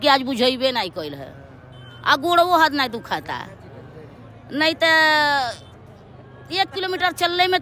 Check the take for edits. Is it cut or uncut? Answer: uncut